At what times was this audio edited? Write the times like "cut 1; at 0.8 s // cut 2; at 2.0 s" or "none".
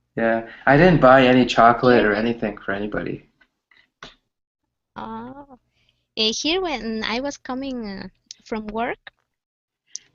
cut 1; at 3.0 s